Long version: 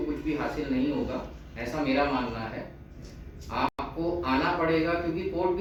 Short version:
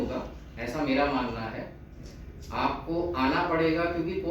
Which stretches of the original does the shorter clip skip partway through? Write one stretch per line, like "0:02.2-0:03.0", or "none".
0:03.7-0:03.8